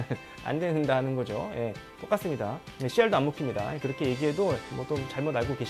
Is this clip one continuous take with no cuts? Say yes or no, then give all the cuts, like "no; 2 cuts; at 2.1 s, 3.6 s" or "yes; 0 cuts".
no; 1 cut; at 4.7 s